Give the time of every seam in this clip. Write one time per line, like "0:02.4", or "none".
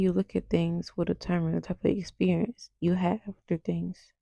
none